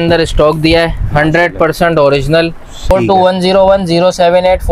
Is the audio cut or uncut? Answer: cut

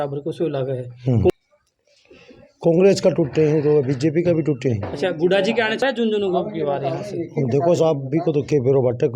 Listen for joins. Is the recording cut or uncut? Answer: cut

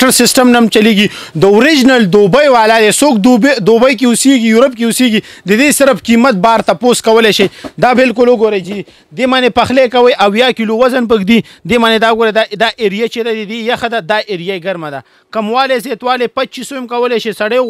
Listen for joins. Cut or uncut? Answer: uncut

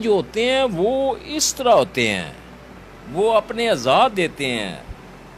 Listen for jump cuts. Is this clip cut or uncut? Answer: uncut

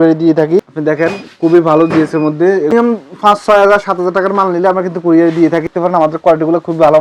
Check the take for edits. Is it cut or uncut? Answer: cut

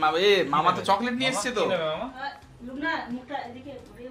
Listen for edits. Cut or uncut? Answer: uncut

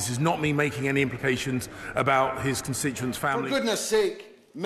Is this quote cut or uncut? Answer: cut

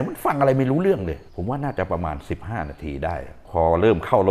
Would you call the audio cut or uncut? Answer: cut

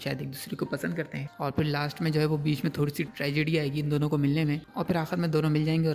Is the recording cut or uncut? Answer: cut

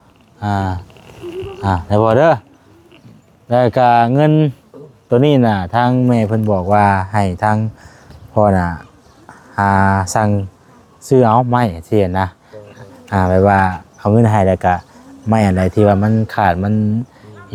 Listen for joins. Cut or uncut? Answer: uncut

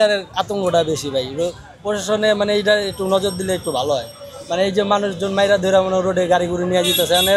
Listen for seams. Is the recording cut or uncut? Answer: uncut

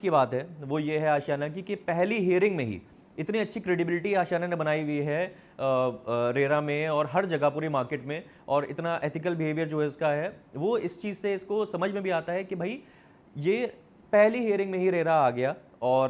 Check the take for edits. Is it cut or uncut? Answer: uncut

